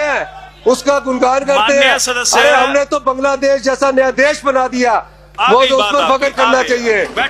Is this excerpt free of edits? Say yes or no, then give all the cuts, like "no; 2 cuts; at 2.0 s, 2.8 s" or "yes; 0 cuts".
yes; 0 cuts